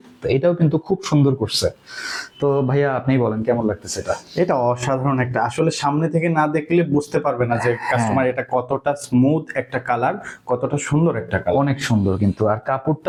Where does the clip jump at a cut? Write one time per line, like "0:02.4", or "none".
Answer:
none